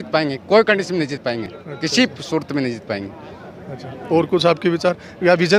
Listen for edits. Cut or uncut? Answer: uncut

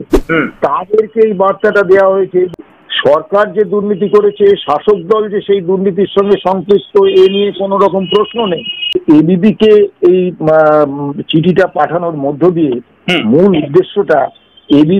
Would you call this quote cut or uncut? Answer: cut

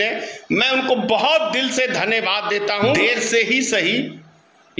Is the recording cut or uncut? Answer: cut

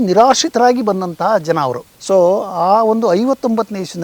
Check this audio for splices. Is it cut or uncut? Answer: cut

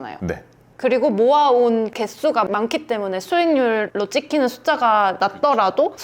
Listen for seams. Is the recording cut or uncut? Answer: cut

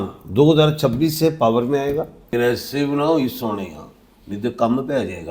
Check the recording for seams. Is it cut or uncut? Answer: cut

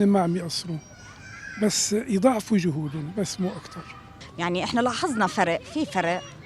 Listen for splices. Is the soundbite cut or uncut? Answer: cut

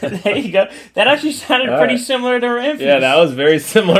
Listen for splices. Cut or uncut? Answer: uncut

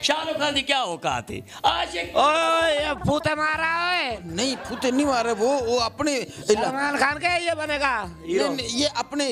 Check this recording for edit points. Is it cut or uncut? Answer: uncut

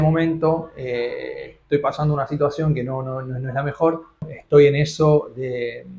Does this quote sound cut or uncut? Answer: cut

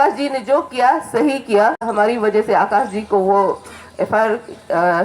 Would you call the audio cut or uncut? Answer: cut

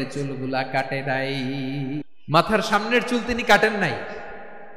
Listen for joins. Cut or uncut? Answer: cut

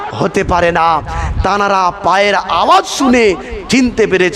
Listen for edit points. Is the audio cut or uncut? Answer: uncut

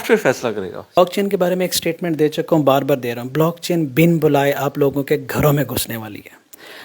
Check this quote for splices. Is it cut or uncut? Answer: cut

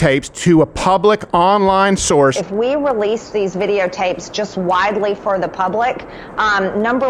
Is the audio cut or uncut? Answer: cut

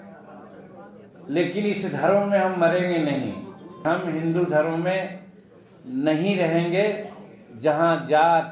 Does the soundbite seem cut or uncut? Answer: cut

